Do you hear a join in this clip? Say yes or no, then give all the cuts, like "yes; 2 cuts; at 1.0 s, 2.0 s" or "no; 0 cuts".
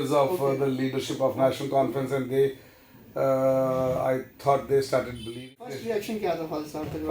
yes; 1 cut; at 5.5 s